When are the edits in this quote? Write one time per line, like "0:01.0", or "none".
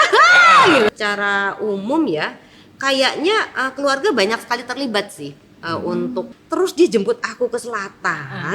0:00.9
0:06.4